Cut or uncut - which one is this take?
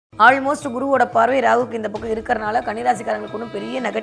uncut